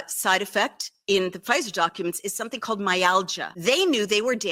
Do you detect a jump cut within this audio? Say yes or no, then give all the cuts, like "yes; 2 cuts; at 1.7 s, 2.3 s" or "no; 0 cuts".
yes; 1 cut; at 3.4 s